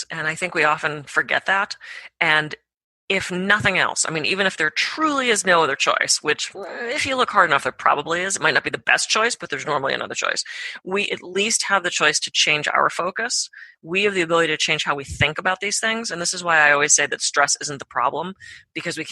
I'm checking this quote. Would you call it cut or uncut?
uncut